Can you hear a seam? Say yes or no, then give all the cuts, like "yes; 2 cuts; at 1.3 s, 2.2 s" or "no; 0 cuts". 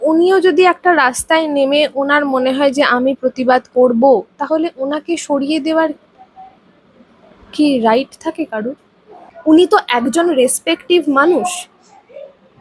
yes; 1 cut; at 9.3 s